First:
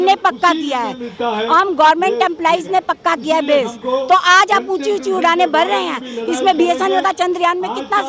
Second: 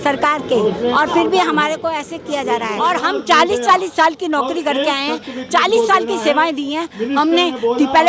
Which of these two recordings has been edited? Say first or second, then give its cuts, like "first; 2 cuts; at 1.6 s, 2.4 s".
second; 1 cut; at 2.7 s